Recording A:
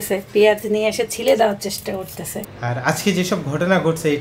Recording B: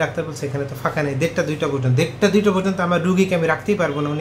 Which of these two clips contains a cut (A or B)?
A